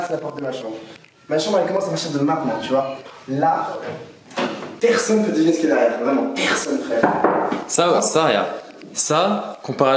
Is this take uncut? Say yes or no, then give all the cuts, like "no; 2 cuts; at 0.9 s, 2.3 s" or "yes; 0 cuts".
no; 1 cut; at 4.7 s